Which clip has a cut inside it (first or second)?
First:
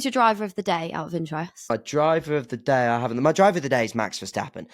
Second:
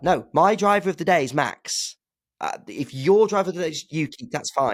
first